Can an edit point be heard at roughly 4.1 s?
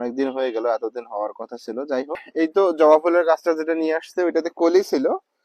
no; 1 cut; at 2.3 s

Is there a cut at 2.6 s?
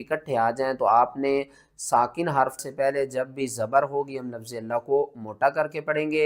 yes; 1 cut; at 2.6 s

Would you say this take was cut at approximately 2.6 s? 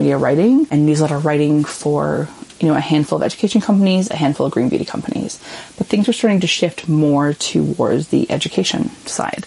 no; 0 cuts

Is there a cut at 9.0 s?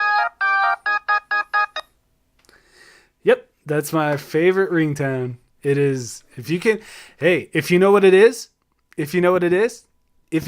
no; 1 cut; at 1.6 s

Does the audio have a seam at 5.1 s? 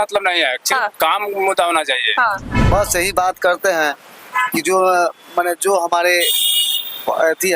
no; 1 cut; at 2.5 s

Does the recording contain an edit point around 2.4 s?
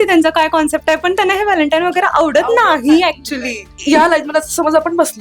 no; 1 cut; at 3.7 s

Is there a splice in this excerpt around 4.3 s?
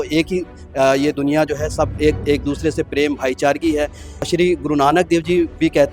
yes; 1 cut; at 4.3 s

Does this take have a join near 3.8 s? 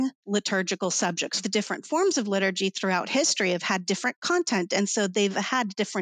no; 1 cut; at 1.4 s

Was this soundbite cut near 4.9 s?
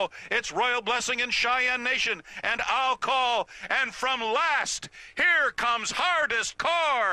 no; 1 cut; at 2.5 s

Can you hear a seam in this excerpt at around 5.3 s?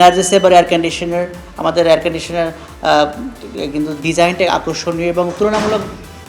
no; 1 cut; at 1.4 s

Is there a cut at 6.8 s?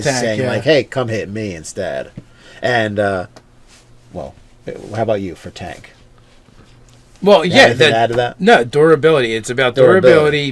yes; 1 cut; at 6.8 s

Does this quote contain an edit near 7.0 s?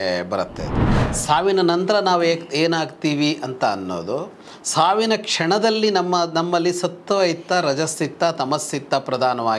no; 1 cut; at 1.1 s

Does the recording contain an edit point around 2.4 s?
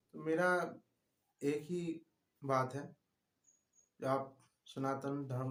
no; 0 cuts

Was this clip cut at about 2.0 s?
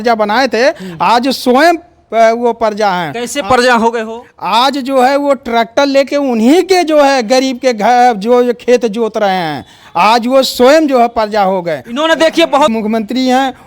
no; 1 cut; at 12.7 s

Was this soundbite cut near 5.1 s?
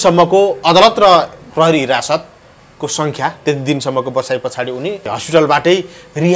yes; 1 cut; at 5.1 s

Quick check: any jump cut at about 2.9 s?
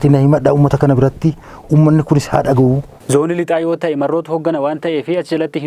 yes; 1 cut; at 2.9 s

